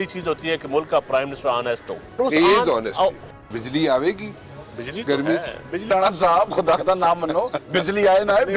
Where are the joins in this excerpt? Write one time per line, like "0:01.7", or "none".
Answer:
0:02.2
0:03.2
0:05.9